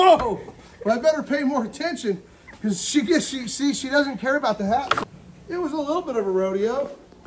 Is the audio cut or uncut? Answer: cut